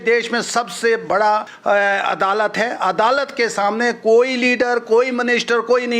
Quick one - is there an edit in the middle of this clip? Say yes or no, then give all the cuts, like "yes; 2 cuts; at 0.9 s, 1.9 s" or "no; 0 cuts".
yes; 1 cut; at 1.5 s